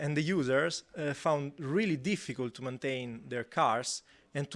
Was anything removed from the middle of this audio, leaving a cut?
no; 0 cuts

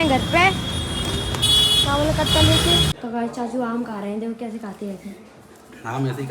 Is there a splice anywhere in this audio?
yes; 1 cut; at 2.9 s

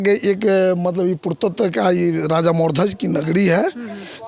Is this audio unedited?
yes; 0 cuts

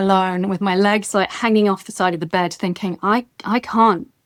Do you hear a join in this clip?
no; 0 cuts

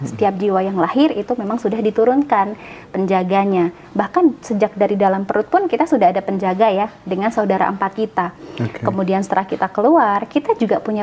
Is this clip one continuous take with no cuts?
yes; 0 cuts

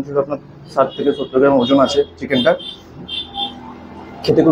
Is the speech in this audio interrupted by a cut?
no; 0 cuts

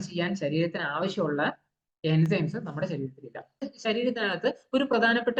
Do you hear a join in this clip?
yes; 1 cut; at 3.6 s

